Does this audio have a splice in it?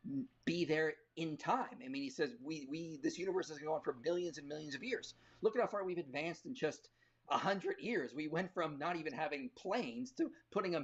no; 0 cuts

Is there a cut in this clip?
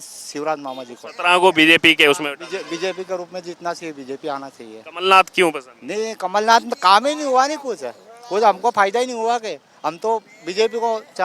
no; 0 cuts

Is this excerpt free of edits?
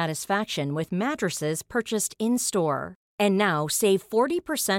yes; 0 cuts

